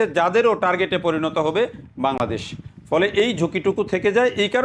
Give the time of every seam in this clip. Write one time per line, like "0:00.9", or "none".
none